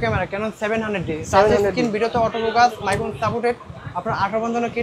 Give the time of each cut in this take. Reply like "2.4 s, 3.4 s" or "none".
none